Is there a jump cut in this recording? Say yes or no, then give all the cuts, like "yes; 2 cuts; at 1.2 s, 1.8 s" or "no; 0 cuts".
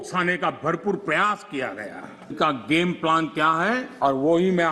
yes; 2 cuts; at 2.3 s, 3.9 s